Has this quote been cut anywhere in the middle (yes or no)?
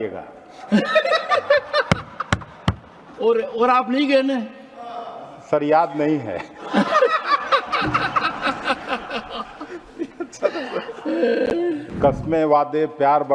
yes